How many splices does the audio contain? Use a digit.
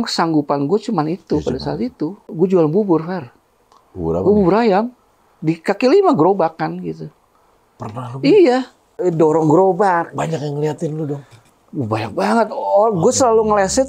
2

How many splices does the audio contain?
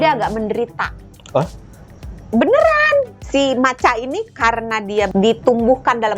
2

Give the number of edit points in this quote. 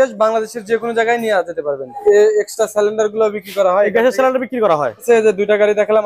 2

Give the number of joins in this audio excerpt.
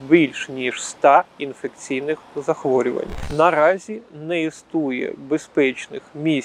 1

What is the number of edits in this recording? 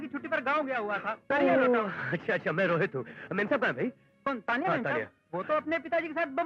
0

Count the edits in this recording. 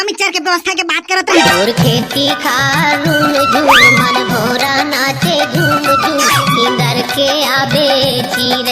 1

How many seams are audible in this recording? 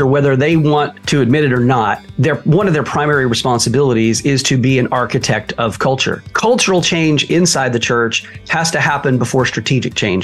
3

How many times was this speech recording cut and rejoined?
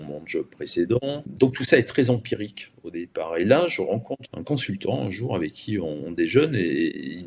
2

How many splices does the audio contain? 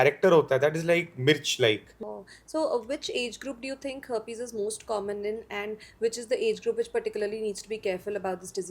1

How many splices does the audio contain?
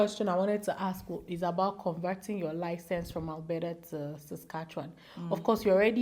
0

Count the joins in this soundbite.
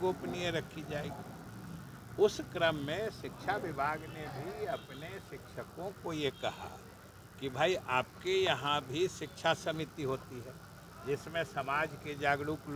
0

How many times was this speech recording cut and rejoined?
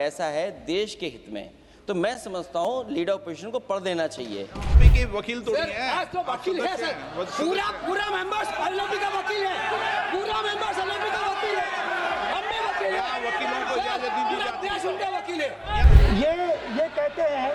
2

